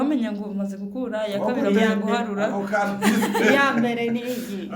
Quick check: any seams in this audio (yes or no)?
no